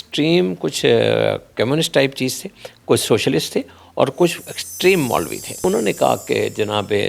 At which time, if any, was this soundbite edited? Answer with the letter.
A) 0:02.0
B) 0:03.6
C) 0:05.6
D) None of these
C